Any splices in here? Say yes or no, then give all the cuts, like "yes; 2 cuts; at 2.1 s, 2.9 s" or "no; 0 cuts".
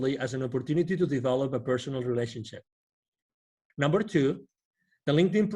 yes; 1 cut; at 3.6 s